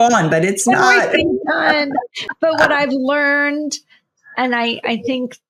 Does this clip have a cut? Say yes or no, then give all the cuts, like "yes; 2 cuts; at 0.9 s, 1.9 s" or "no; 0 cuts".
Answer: no; 0 cuts